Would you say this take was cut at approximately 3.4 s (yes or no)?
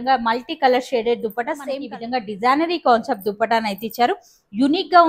no